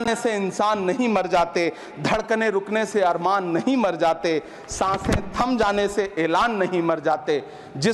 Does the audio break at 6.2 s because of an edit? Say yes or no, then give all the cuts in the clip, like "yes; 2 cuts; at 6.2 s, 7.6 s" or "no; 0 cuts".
no; 0 cuts